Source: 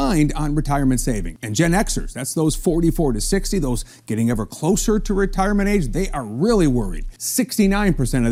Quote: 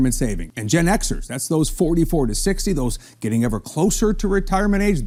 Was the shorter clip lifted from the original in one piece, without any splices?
yes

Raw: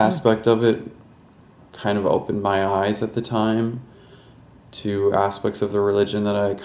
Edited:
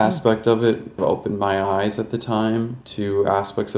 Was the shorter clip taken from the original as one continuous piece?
no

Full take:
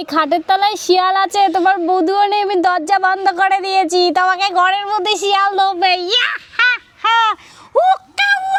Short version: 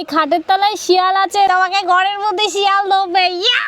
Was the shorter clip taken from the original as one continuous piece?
no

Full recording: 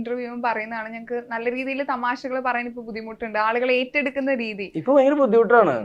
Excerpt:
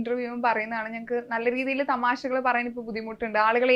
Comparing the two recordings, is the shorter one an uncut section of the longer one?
yes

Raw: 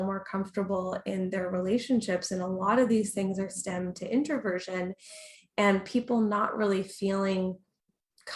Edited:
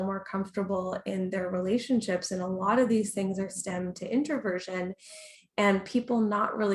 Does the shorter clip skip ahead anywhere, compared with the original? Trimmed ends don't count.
no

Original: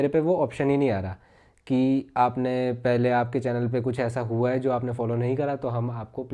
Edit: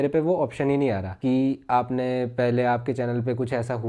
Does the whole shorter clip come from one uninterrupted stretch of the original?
no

